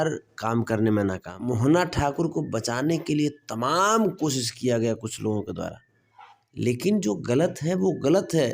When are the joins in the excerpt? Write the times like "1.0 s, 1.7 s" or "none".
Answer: 1.3 s